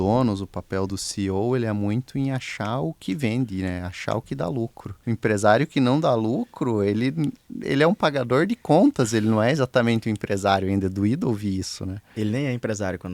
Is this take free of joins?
no; 2 cuts; at 0.9 s, 4.9 s

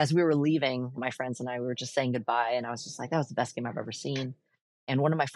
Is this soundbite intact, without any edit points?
no; 1 cut; at 1.0 s

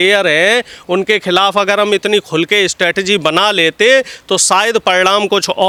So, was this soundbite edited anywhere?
no; 0 cuts

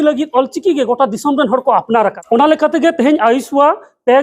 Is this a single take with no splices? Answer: no; 1 cut; at 2.2 s

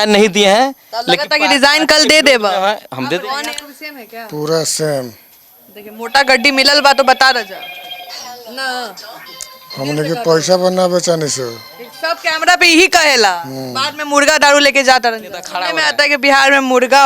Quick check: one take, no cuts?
no; 2 cuts; at 3.2 s, 15.6 s

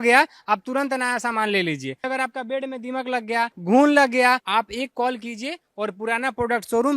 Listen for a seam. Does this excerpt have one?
yes; 3 cuts; at 2.1 s, 3.6 s, 4.4 s

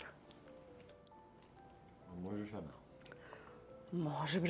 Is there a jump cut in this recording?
yes; 1 cut; at 1.0 s

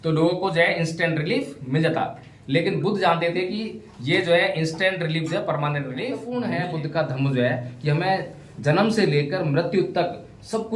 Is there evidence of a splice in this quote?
yes; 1 cut; at 6.2 s

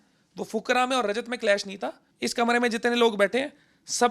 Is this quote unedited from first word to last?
no; 1 cut; at 2.0 s

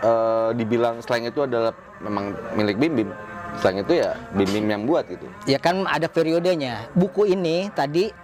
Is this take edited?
no; 0 cuts

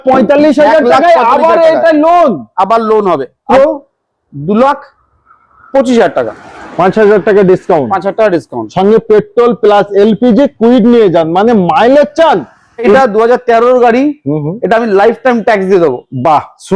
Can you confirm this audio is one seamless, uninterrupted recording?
no; 2 cuts; at 3.4 s, 12.9 s

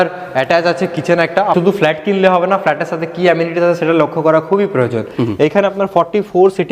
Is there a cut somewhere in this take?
yes; 2 cuts; at 1.5 s, 5.1 s

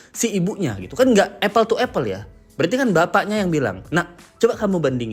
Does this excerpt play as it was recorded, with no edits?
yes; 0 cuts

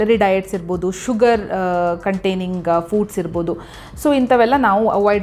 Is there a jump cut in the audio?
no; 0 cuts

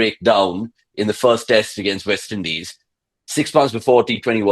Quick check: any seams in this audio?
no; 0 cuts

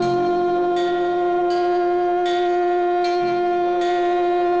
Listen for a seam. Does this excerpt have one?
no; 0 cuts

